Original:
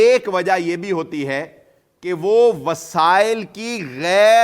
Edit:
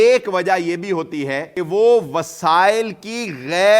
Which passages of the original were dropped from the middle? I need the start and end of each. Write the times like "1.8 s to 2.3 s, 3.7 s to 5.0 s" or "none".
1.5 s to 2.0 s